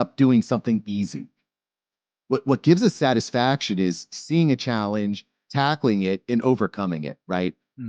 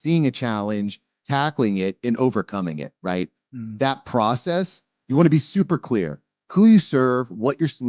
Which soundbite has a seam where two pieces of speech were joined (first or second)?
second